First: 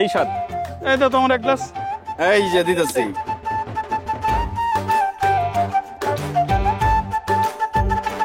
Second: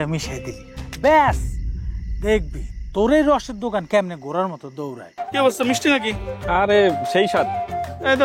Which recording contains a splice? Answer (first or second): second